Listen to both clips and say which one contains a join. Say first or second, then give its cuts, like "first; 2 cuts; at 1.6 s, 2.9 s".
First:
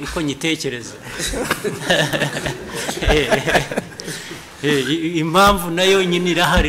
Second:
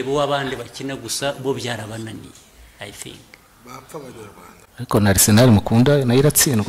second; 1 cut; at 4.5 s